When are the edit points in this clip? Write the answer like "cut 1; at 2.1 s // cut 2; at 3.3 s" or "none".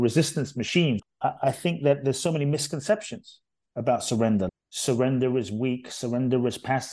cut 1; at 1.1 s // cut 2; at 4.5 s